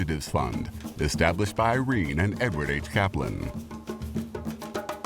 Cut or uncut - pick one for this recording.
cut